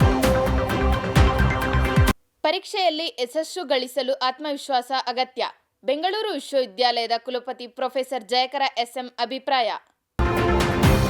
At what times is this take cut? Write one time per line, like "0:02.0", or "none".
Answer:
0:01.2
0:02.3